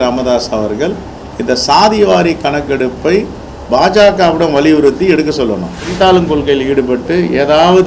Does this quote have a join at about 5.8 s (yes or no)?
yes